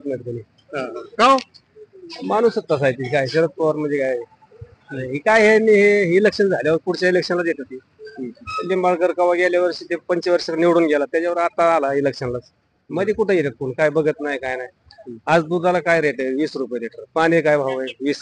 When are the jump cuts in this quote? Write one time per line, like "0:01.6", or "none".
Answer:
none